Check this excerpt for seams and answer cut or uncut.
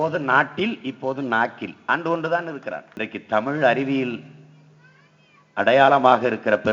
cut